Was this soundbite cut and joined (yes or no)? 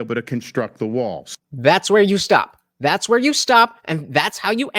no